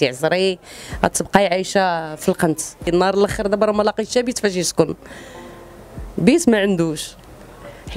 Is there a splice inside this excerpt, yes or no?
yes